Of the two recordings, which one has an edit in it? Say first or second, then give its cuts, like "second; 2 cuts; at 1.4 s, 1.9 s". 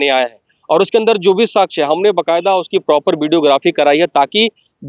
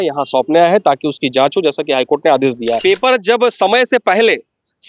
second; 1 cut; at 2.8 s